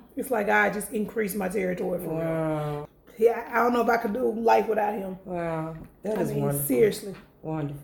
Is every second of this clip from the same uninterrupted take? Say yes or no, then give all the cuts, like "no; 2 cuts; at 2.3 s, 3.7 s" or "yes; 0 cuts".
no; 1 cut; at 2.8 s